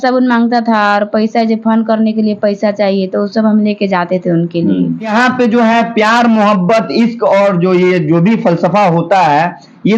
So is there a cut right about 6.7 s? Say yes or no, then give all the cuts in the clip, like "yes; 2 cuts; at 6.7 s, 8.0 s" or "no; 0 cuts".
no; 1 cut; at 5.1 s